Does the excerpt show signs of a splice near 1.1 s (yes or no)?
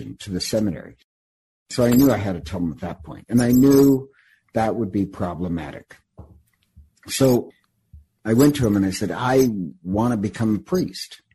yes